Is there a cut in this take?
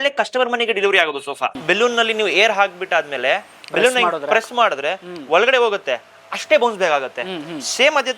yes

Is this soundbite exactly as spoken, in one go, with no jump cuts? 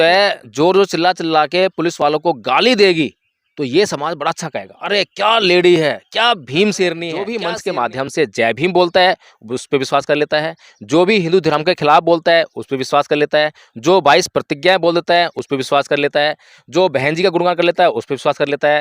no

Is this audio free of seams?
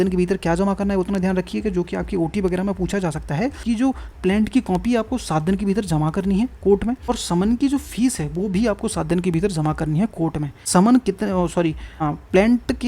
no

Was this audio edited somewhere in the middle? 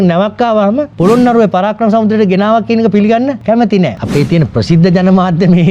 yes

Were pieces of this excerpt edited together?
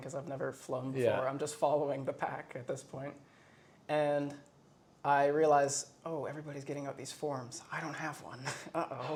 no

